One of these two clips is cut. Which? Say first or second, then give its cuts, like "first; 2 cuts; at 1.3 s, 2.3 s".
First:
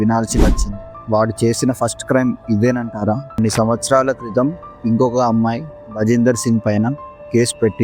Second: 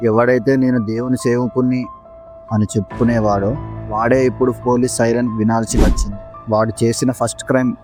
first; 1 cut; at 3.4 s